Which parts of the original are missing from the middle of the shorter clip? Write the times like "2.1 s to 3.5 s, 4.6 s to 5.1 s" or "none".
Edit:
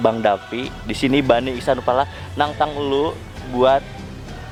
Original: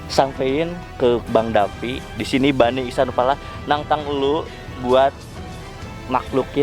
none

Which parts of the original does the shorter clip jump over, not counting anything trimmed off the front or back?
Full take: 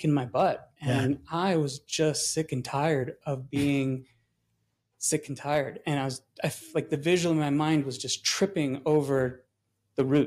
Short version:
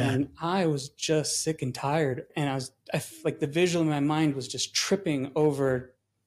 3.2 s to 5.8 s

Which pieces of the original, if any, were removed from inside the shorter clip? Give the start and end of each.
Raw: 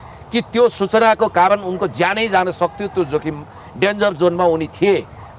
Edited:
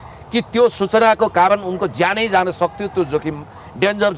none

